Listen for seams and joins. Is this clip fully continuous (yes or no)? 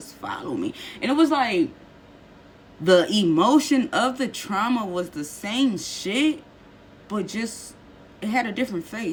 yes